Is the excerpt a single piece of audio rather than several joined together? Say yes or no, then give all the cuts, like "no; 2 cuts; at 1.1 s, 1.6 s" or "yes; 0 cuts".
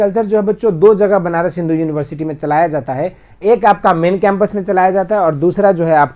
yes; 0 cuts